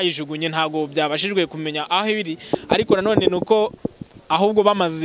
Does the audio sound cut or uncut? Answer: uncut